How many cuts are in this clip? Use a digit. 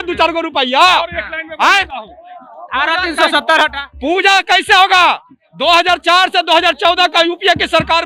0